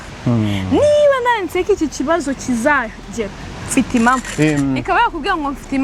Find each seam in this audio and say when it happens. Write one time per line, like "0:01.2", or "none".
0:04.3

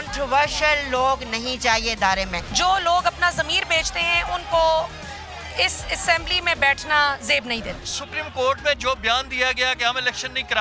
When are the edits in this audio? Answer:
0:02.4
0:07.8

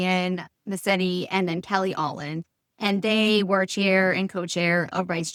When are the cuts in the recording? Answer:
none

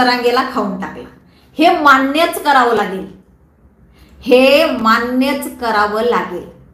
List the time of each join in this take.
none

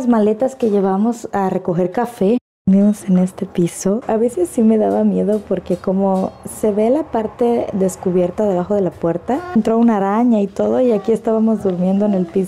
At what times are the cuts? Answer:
0:02.5
0:04.0
0:09.6

